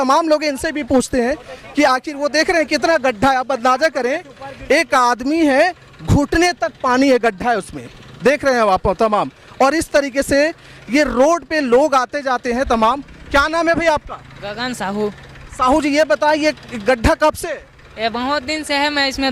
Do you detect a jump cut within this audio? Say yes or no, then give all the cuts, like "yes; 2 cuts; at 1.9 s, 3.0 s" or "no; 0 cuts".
no; 0 cuts